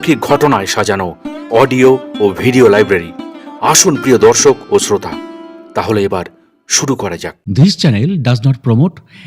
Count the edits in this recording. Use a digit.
1